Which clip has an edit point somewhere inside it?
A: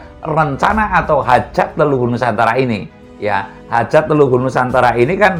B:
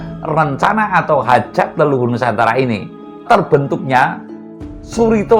B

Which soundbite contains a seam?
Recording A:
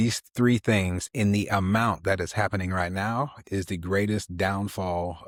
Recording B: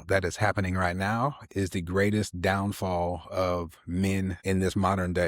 B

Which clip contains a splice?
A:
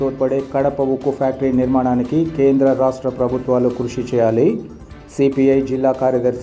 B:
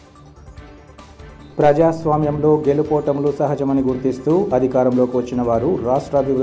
B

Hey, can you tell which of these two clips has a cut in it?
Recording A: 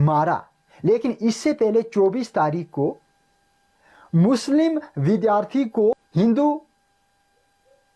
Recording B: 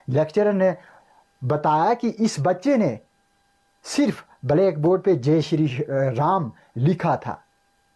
A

